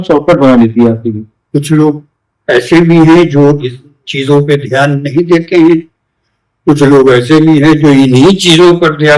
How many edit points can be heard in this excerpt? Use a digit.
1